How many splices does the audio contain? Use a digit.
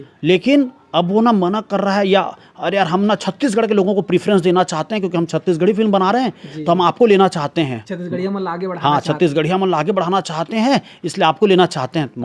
0